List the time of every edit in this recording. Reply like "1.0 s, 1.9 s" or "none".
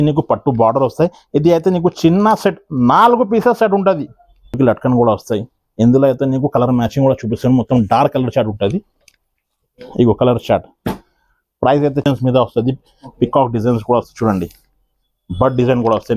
4.6 s, 12.0 s